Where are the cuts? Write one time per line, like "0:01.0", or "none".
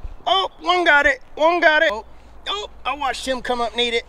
0:02.0